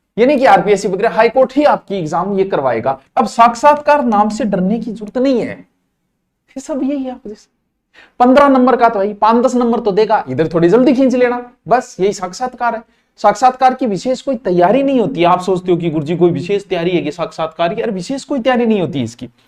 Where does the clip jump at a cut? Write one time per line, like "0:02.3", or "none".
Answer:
0:03.0